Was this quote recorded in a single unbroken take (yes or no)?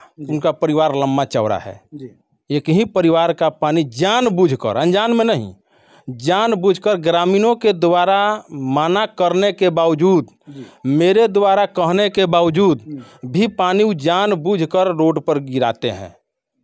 yes